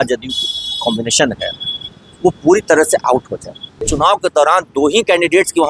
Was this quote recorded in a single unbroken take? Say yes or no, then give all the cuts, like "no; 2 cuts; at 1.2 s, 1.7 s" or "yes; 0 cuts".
no; 1 cut; at 3.9 s